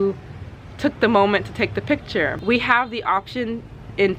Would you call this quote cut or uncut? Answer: cut